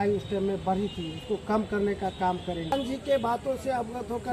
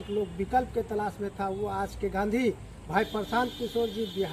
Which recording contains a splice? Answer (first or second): first